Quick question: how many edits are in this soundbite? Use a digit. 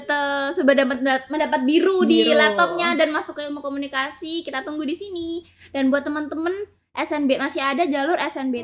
0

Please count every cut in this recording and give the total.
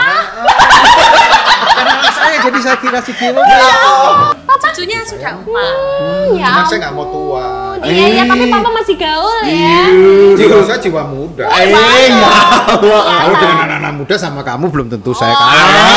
1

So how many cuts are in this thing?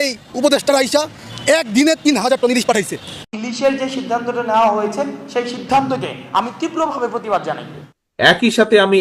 2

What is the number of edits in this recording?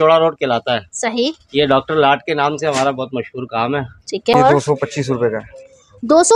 1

